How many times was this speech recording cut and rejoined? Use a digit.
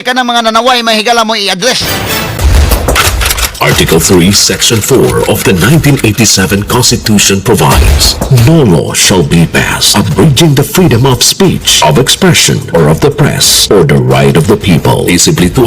1